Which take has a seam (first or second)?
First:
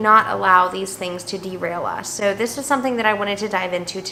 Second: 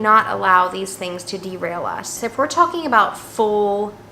second